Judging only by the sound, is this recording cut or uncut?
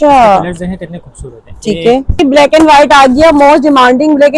cut